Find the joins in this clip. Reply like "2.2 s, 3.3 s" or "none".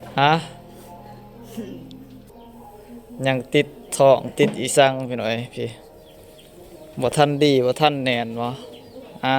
2.3 s